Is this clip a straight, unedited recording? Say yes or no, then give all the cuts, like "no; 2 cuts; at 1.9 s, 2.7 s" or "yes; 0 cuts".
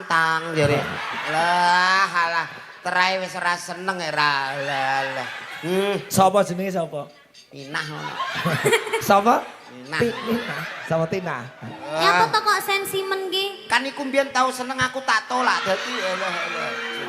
no; 1 cut; at 10.7 s